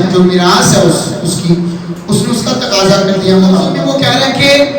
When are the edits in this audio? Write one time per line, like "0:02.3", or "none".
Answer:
0:03.8